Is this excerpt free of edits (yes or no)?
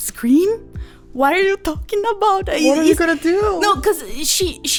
yes